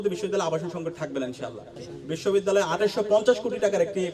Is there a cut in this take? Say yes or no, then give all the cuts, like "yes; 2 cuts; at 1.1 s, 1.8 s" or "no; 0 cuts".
yes; 1 cut; at 1.9 s